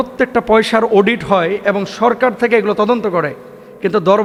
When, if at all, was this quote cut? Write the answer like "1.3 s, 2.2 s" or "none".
none